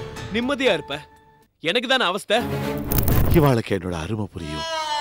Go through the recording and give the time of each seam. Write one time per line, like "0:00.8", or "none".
0:03.1